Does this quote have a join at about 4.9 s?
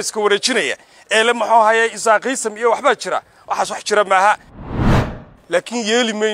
yes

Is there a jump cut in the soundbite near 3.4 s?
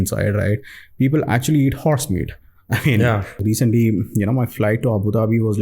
yes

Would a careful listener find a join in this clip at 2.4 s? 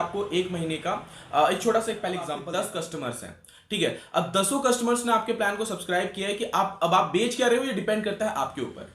yes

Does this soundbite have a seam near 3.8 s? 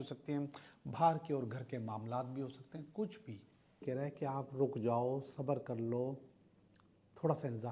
yes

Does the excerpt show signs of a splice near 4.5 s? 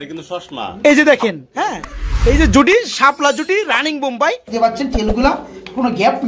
yes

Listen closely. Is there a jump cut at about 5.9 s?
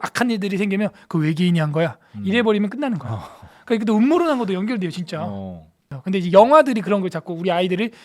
yes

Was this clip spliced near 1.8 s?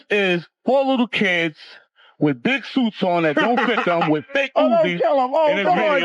no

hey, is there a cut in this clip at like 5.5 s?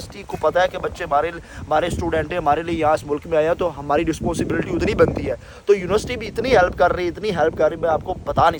no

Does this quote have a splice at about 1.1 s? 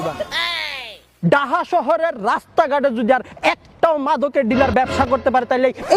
no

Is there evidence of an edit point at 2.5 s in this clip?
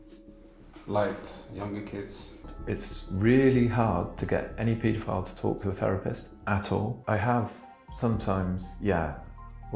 yes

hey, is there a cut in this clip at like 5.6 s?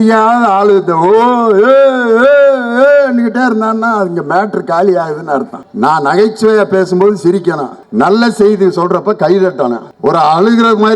no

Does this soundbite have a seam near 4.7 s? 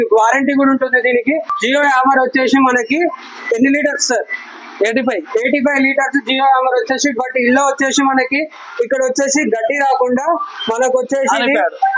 no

